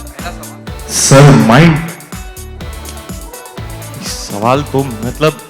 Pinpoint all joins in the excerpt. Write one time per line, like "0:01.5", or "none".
0:01.9
0:04.3